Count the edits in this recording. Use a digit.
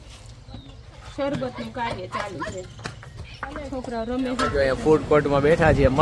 1